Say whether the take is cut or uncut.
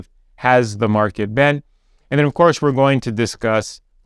uncut